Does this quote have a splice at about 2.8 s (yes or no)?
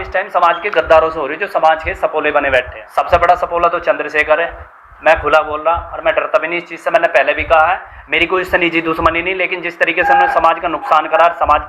yes